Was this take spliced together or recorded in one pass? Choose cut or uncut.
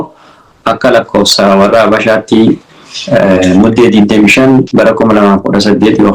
uncut